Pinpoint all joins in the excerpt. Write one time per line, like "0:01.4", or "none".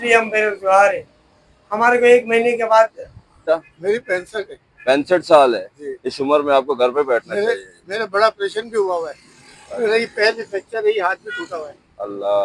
0:03.4